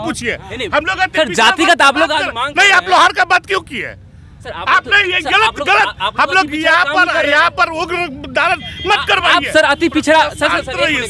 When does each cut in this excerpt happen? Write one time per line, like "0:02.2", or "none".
none